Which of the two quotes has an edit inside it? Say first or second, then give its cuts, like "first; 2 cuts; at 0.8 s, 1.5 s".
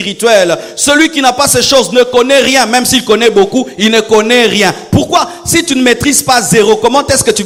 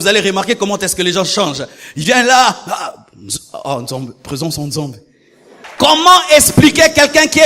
second; 1 cut; at 5.6 s